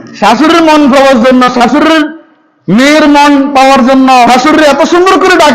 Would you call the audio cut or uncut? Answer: cut